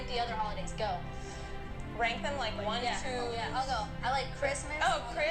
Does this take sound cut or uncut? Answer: uncut